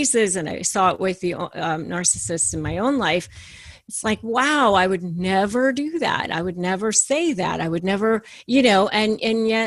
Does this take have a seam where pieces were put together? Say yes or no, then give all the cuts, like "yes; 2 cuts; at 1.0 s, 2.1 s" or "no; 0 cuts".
no; 0 cuts